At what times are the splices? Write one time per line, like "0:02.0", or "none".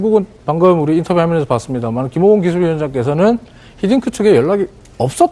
0:03.1